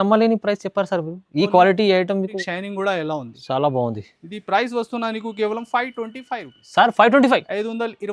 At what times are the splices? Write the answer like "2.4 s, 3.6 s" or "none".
2.4 s